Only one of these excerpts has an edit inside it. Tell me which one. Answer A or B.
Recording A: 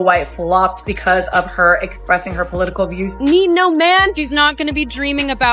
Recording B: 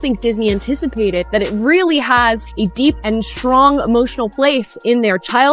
A